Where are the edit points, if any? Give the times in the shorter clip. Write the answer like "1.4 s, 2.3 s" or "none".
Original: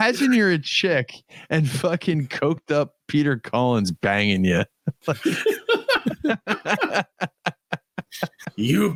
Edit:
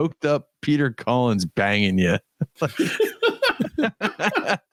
none

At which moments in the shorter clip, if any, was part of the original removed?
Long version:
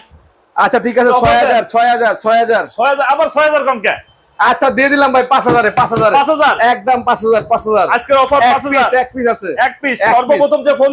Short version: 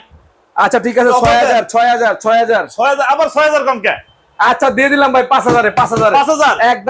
none

